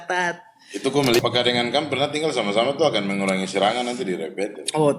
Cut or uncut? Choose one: cut